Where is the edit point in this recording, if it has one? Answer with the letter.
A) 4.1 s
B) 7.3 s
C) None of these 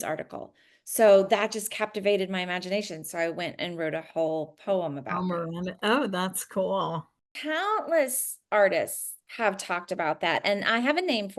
B